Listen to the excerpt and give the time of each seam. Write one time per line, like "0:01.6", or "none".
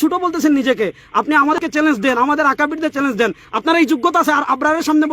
0:01.6